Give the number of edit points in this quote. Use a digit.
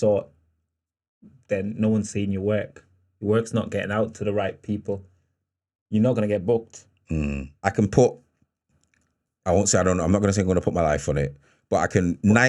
1